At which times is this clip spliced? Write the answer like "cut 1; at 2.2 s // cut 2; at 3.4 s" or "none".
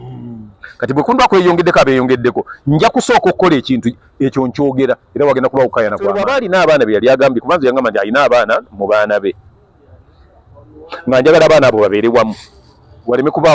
cut 1; at 6.2 s